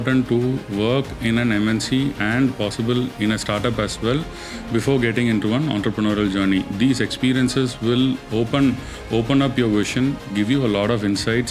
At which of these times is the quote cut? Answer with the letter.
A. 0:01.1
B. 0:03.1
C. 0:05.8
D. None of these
D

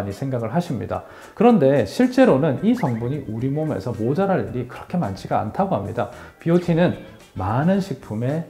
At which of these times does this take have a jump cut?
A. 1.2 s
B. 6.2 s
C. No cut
B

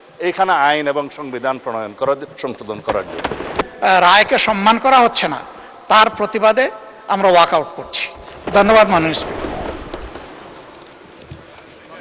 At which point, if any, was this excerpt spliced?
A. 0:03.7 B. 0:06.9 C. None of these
A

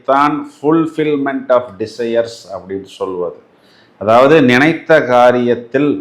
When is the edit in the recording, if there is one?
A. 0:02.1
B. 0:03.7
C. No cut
C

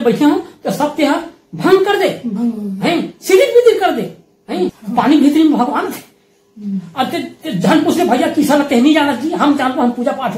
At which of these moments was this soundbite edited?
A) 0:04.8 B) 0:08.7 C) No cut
A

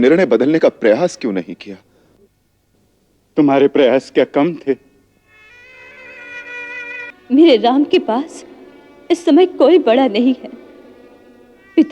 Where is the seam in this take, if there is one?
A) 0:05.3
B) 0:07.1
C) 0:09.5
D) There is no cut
B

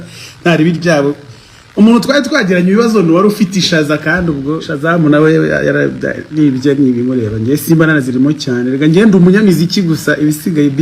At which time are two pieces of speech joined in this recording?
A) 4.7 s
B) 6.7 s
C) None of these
A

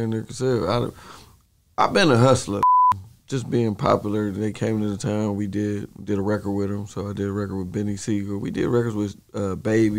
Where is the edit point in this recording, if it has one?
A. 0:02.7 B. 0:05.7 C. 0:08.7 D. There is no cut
A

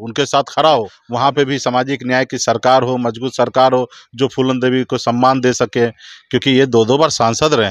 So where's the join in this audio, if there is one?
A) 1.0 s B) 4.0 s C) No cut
A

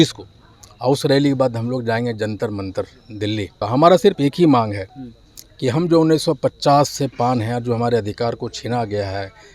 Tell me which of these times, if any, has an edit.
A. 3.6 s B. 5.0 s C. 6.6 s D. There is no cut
A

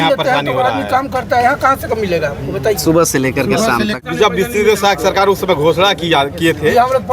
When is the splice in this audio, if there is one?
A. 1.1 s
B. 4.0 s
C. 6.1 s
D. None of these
B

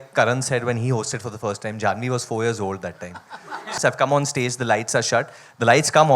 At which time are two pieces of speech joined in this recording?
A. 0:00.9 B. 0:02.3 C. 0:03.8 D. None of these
C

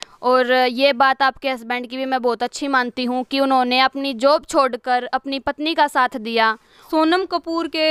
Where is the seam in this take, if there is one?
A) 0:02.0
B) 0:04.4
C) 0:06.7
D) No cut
C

